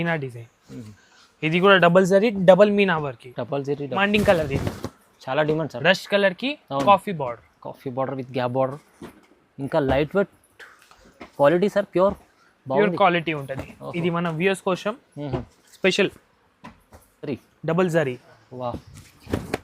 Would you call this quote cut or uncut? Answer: cut